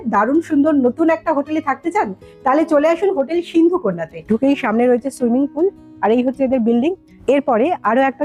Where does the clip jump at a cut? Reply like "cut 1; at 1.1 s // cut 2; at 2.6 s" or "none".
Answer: cut 1; at 4.1 s // cut 2; at 7.1 s